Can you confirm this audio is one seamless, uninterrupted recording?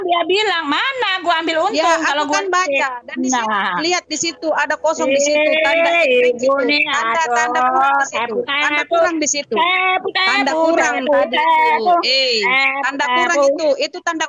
yes; 0 cuts

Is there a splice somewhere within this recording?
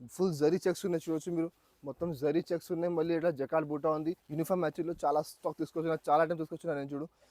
yes; 1 cut; at 4.2 s

